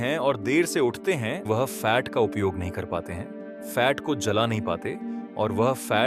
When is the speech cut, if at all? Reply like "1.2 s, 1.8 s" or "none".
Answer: 1.5 s

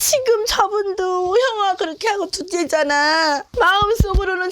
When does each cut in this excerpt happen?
3.5 s

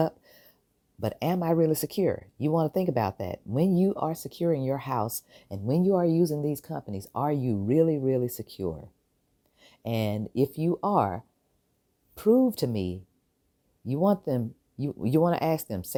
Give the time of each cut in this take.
none

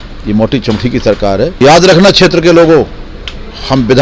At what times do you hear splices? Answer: 1.5 s

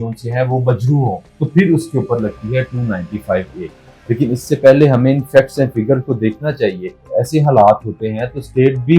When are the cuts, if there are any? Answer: 1.3 s, 7.1 s

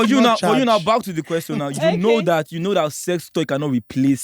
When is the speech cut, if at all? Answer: 3.3 s

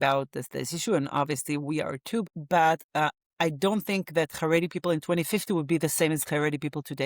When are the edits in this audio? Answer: 2.2 s

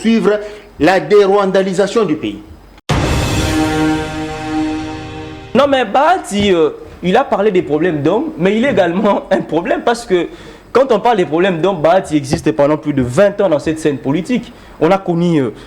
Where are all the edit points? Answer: 2.9 s, 5.5 s

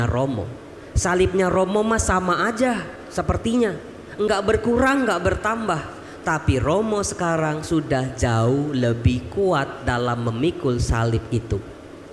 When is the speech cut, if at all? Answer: none

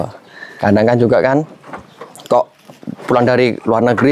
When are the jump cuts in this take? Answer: none

